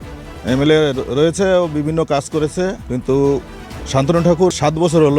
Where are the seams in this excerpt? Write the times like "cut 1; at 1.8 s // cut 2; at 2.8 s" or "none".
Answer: cut 1; at 2.8 s // cut 2; at 4.5 s